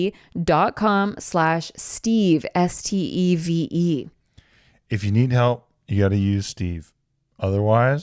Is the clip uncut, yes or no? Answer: yes